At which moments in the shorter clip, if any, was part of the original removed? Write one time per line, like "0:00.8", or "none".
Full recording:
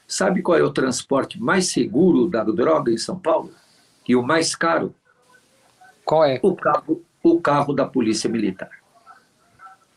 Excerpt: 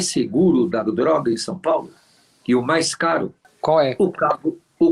0:03.4